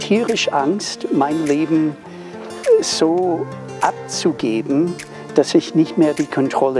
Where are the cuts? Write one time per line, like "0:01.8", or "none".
none